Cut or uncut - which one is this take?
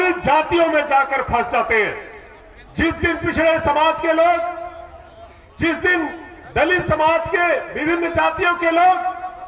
uncut